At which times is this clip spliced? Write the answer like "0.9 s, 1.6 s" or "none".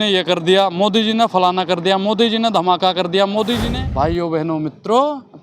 3.7 s

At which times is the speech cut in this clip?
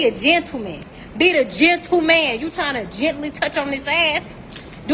none

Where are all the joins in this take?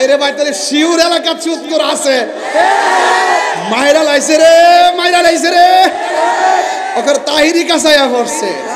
none

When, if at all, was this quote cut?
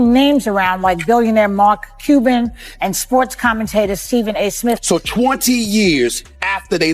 4.8 s

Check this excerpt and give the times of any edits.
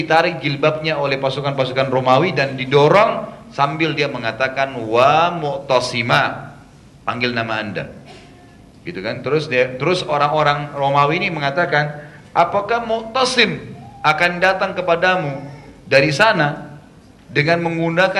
none

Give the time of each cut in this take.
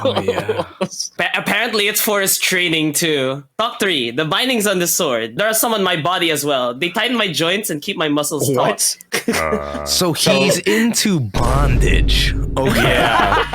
9.0 s

